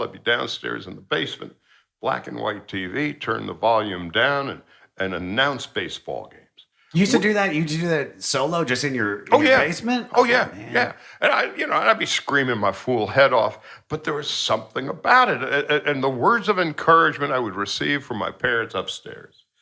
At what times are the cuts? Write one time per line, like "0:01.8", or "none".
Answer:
none